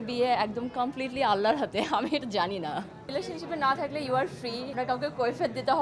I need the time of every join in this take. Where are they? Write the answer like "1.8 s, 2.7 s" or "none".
3.1 s, 4.7 s